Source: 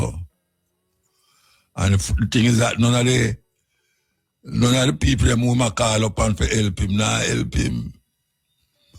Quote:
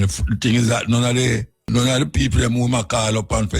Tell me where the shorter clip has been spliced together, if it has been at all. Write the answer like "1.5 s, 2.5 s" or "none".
1.5 s